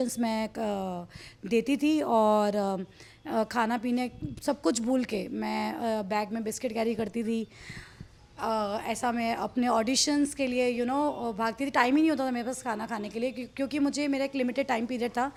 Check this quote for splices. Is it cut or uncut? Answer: uncut